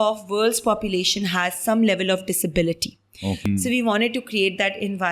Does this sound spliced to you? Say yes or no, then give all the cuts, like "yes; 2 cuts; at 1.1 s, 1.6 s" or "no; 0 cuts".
yes; 1 cut; at 3.4 s